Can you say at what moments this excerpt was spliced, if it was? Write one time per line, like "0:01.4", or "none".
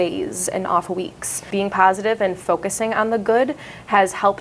0:01.4